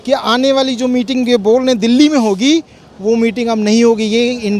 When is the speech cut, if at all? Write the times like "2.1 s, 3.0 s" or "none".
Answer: none